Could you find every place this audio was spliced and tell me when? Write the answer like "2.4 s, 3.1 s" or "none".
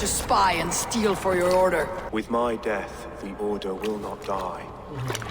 2.0 s